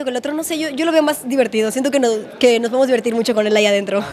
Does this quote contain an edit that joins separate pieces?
no; 0 cuts

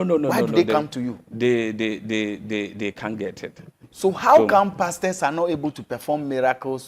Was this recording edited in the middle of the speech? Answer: yes; 1 cut; at 3.9 s

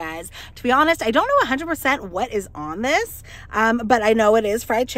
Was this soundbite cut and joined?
no; 0 cuts

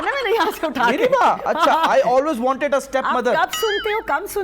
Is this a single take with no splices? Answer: yes; 0 cuts

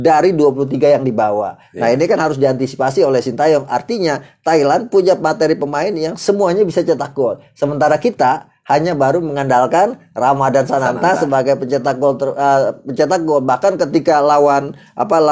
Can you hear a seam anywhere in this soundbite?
no; 0 cuts

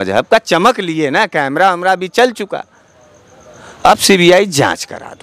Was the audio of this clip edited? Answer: no; 0 cuts

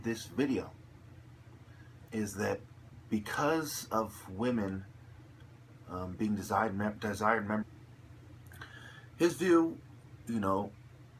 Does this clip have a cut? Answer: no; 0 cuts

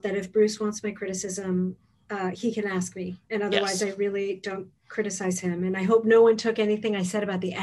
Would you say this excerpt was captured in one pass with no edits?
yes; 0 cuts

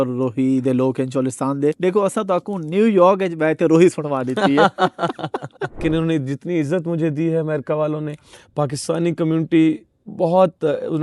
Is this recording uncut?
no; 2 cuts; at 1.8 s, 5.8 s

